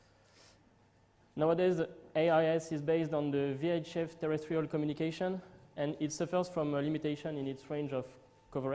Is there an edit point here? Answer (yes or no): no